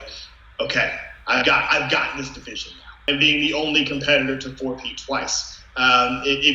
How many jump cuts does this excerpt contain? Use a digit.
1